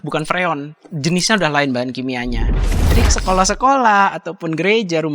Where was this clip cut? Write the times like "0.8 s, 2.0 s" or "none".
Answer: 2.7 s